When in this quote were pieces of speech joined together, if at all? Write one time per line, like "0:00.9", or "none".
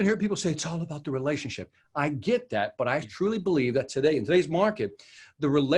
none